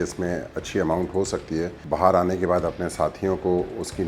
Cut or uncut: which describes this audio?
cut